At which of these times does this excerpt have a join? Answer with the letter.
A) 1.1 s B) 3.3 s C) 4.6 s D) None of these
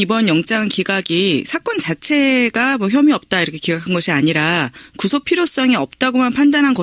D